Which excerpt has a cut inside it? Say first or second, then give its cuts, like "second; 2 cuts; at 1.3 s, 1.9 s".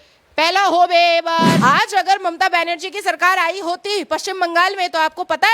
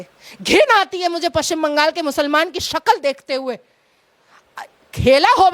first; 1 cut; at 1.6 s